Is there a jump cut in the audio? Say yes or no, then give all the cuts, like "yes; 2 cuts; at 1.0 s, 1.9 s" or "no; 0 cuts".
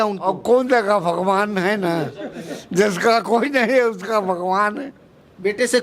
no; 0 cuts